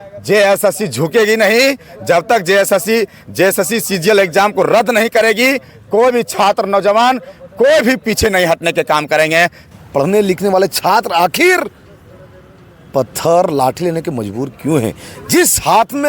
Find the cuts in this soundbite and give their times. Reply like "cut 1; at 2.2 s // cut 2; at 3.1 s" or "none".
cut 1; at 9.6 s